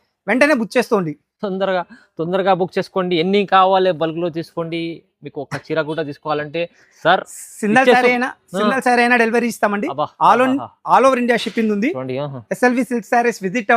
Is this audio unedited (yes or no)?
yes